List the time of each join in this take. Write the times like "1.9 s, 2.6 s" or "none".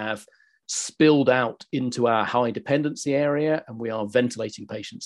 none

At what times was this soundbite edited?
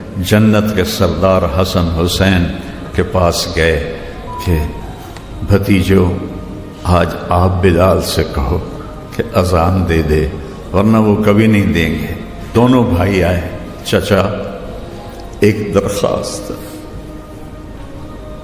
12.5 s

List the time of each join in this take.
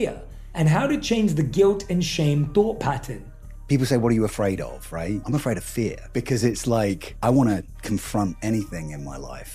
none

